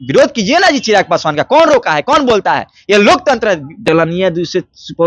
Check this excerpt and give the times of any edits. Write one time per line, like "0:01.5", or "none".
0:03.8